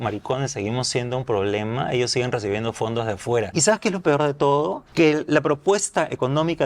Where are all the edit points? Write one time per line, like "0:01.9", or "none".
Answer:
0:03.5
0:04.8